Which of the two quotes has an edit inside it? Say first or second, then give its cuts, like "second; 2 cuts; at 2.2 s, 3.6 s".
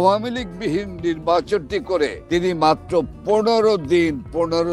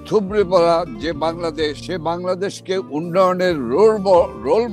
second; 1 cut; at 1.8 s